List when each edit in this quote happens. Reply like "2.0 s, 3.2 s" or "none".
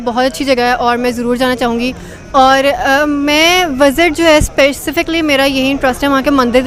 none